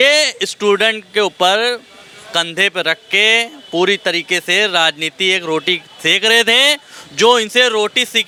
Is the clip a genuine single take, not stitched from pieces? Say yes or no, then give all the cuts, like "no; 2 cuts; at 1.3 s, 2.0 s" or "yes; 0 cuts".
yes; 0 cuts